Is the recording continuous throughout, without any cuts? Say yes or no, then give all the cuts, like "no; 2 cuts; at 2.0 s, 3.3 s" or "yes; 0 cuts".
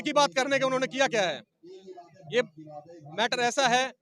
yes; 0 cuts